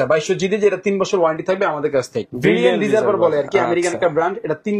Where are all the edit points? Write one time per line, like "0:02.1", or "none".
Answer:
0:02.3